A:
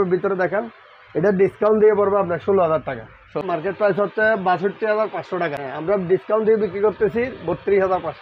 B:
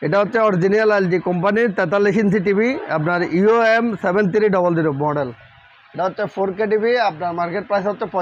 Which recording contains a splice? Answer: A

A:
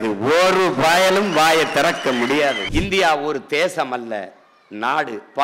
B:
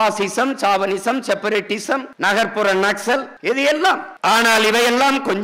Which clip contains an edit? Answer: A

